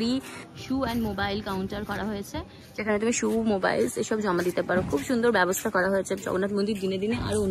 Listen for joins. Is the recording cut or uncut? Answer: uncut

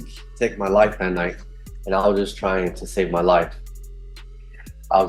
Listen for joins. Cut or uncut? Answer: uncut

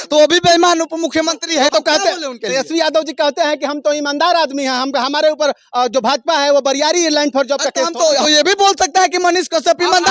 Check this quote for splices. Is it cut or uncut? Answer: cut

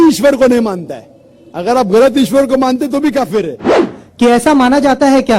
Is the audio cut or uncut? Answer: cut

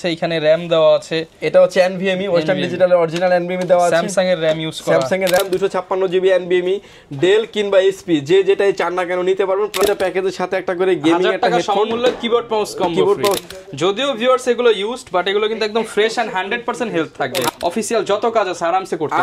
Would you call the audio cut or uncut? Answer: cut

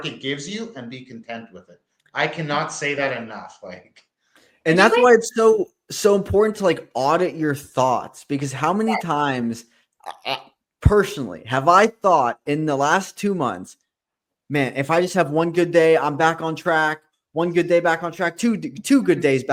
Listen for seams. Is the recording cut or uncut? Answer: uncut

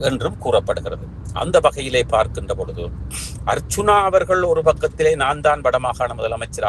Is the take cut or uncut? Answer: uncut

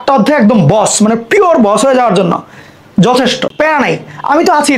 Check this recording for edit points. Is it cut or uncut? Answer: cut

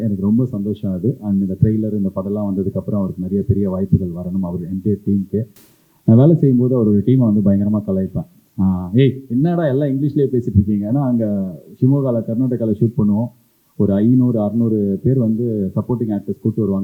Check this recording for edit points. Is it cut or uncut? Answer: uncut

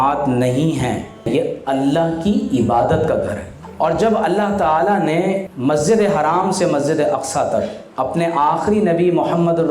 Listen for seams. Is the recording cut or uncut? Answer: cut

